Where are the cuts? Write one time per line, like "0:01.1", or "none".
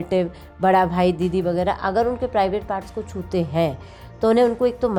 none